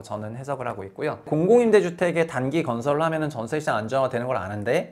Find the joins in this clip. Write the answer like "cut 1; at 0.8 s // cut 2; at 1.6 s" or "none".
cut 1; at 1.3 s

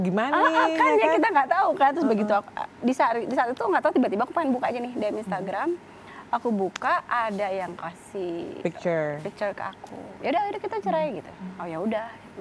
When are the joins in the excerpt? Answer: cut 1; at 10.1 s

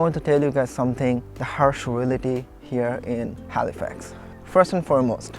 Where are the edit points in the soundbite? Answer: cut 1; at 1.4 s

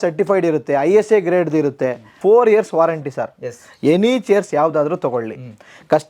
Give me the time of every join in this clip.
cut 1; at 2.1 s

